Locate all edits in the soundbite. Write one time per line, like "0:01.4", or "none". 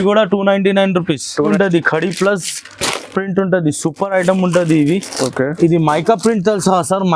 0:01.4